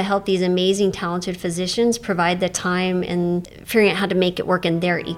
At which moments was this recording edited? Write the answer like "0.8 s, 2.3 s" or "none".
3.5 s